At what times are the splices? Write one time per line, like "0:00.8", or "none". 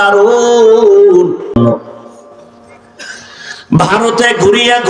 0:01.6